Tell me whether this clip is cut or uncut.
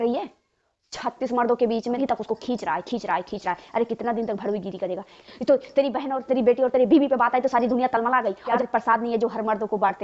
cut